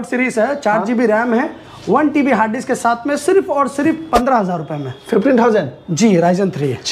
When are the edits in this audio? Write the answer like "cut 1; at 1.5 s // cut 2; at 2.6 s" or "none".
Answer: none